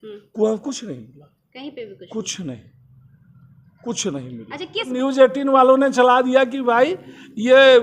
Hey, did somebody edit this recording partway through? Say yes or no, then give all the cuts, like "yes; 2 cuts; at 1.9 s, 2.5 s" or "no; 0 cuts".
yes; 1 cut; at 4.9 s